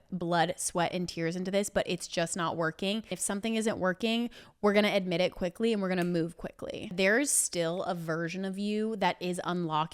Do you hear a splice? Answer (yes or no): yes